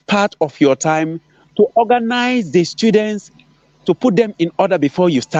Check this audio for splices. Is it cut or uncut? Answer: uncut